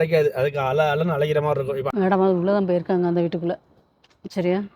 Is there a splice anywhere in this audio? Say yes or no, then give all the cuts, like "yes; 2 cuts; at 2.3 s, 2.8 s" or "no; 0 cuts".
yes; 1 cut; at 1.9 s